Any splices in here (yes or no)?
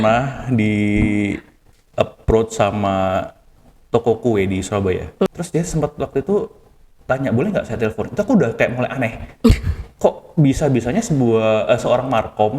yes